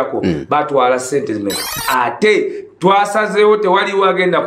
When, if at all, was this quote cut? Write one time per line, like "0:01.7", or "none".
0:01.7